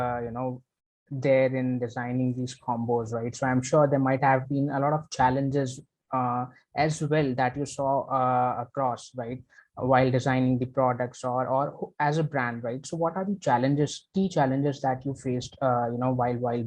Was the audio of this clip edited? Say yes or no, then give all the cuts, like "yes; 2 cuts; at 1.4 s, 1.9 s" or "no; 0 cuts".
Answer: no; 0 cuts